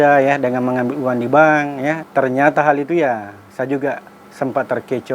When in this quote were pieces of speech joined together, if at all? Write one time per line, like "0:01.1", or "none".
0:02.0